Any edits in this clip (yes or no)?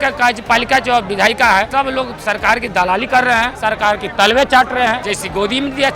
yes